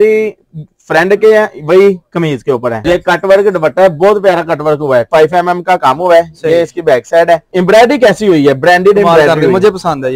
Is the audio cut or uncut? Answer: cut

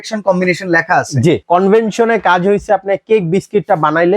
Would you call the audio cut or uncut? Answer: cut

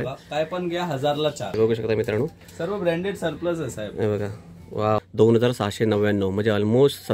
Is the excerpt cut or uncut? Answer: cut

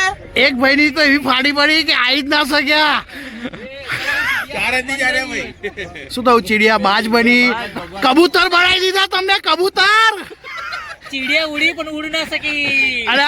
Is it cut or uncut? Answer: uncut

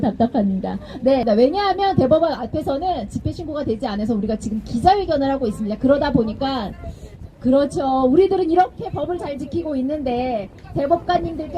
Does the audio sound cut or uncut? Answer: cut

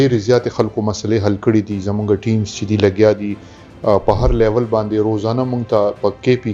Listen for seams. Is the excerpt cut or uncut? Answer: uncut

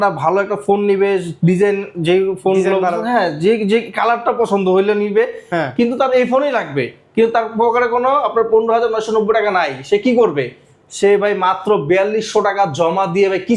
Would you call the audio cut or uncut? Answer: uncut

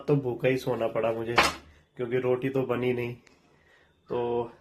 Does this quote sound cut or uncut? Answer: uncut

